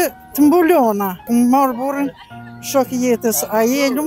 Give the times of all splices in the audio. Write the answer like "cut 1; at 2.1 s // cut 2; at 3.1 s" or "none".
cut 1; at 1.2 s

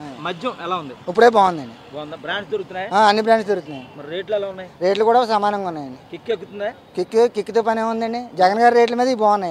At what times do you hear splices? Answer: none

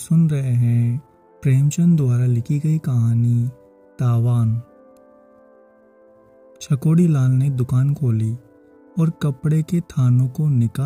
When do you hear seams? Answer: cut 1; at 4.6 s // cut 2; at 6.2 s

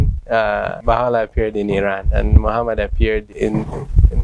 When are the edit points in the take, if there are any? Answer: cut 1; at 0.8 s // cut 2; at 3.3 s

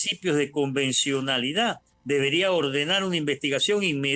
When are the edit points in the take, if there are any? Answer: cut 1; at 1.9 s

